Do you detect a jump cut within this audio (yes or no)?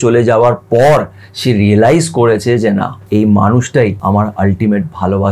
yes